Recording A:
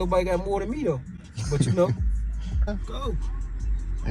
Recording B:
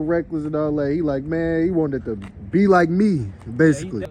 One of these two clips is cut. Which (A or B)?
A